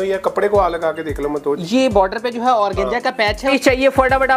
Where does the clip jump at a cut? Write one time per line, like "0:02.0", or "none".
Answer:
0:03.5